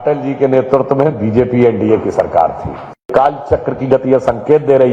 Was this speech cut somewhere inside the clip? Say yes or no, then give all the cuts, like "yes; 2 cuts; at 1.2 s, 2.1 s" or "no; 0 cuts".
yes; 1 cut; at 3.1 s